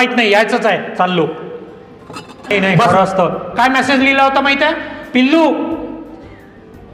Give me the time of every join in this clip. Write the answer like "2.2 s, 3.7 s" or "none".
2.7 s